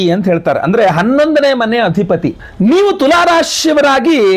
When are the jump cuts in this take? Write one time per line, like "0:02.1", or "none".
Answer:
0:02.4

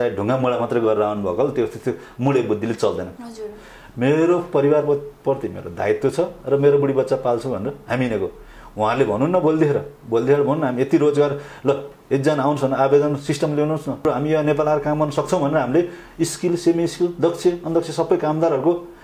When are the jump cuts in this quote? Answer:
0:03.1
0:14.0

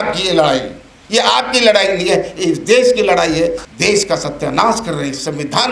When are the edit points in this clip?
0:03.6

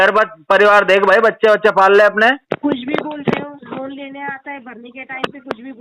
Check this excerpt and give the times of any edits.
0:02.5

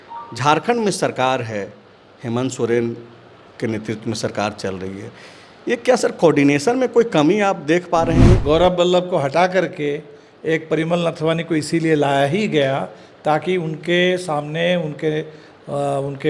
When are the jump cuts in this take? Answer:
0:08.4

